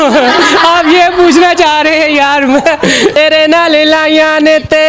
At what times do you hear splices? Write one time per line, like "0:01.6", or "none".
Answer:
0:03.1